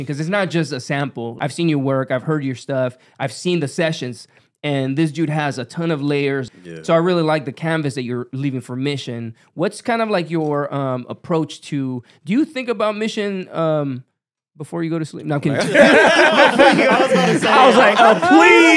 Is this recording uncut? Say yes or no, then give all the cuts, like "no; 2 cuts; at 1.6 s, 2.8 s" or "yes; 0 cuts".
no; 2 cuts; at 1.3 s, 6.5 s